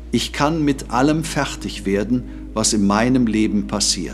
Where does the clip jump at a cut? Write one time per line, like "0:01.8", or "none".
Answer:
none